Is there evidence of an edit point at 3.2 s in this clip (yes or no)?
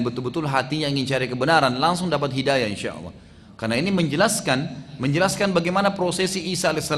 no